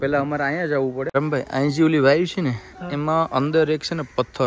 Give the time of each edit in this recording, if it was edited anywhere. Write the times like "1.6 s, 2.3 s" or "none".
1.0 s